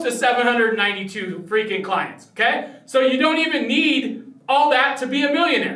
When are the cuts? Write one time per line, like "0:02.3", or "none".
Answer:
none